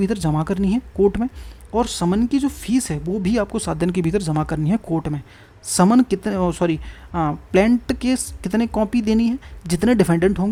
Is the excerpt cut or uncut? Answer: uncut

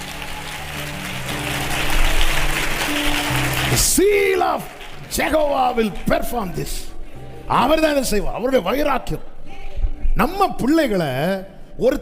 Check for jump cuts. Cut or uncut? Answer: uncut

